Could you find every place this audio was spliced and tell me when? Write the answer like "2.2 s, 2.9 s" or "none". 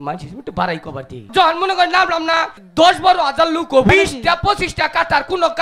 1.3 s, 2.5 s, 3.9 s